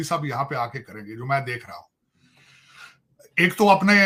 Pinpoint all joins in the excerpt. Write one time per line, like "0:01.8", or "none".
none